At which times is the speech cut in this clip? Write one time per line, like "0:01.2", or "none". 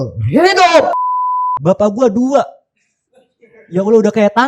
0:01.5